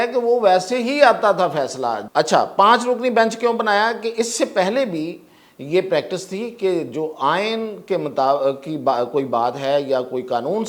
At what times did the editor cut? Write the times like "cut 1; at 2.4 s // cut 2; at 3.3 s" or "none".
cut 1; at 2.0 s